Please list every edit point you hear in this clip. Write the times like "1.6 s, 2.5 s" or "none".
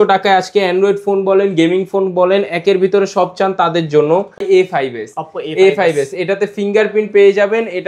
4.4 s